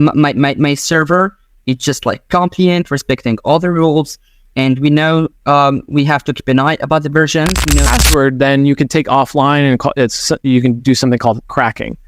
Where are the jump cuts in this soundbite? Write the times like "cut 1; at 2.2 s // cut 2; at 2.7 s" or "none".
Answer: cut 1; at 7.9 s